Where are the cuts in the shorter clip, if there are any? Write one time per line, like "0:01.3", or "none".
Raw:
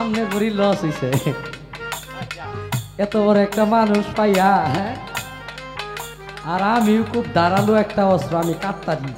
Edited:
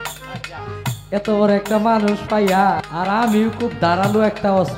0:02.8